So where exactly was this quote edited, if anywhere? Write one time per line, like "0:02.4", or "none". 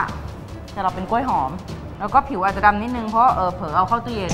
0:01.7